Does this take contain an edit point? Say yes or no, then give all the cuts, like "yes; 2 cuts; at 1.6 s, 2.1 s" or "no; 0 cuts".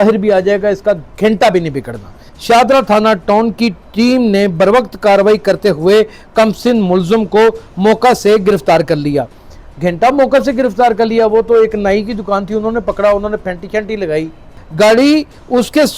yes; 2 cuts; at 2.3 s, 14.6 s